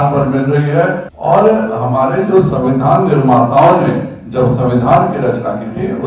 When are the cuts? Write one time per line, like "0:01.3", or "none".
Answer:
0:01.1